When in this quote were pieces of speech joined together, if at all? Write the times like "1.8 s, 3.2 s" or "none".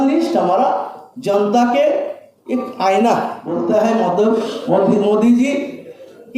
3.4 s